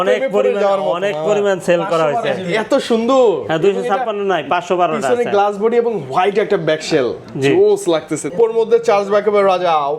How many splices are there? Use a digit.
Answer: 1